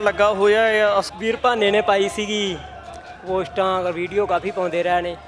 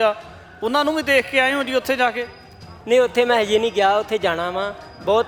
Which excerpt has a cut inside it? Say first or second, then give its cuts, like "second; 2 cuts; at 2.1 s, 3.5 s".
first; 1 cut; at 1.1 s